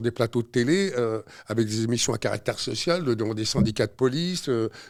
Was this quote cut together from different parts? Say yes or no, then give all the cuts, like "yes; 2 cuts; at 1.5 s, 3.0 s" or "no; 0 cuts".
no; 0 cuts